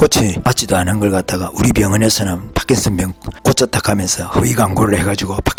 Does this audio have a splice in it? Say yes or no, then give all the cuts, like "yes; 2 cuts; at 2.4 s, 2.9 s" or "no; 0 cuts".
no; 0 cuts